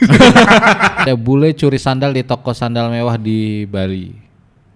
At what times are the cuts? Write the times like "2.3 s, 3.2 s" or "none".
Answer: 1.0 s